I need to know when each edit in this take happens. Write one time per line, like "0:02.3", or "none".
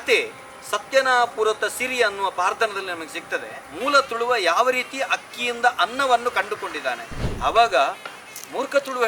0:03.6
0:07.2